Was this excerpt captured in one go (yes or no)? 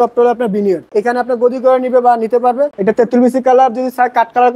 no